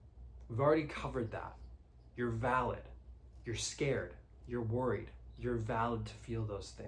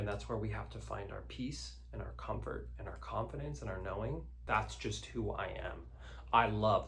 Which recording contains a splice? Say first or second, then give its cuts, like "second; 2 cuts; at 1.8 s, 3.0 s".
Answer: second; 1 cut; at 4.4 s